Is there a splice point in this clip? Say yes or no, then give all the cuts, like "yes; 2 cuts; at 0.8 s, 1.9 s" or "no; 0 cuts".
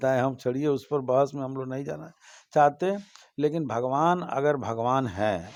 no; 0 cuts